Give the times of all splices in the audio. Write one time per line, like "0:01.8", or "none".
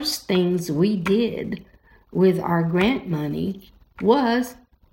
none